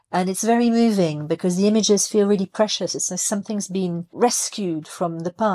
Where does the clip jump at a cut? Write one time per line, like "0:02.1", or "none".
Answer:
0:04.1